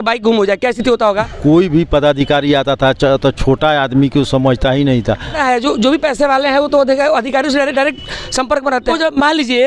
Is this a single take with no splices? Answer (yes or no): no